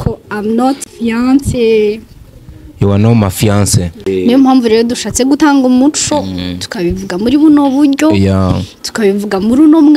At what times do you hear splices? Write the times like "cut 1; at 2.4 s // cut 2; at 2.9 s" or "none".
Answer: cut 1; at 0.9 s // cut 2; at 4.1 s